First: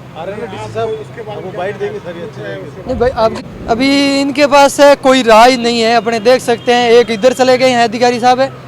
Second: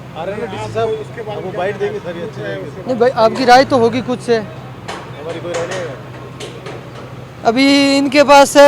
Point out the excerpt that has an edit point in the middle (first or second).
first